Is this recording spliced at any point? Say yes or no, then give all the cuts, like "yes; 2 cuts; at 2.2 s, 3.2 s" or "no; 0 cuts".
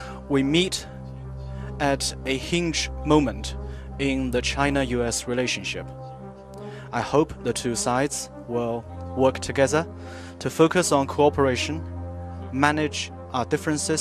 no; 0 cuts